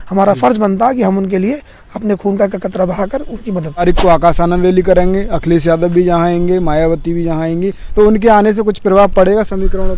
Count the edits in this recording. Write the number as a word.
one